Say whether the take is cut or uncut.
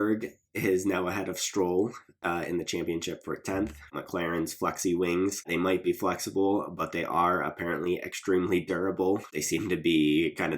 cut